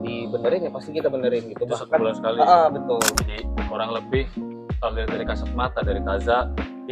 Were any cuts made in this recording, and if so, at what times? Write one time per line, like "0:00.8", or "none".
0:03.1